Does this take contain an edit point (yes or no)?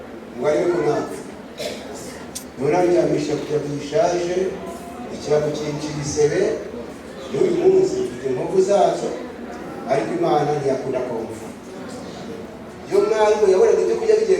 yes